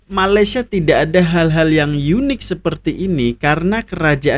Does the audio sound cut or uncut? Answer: uncut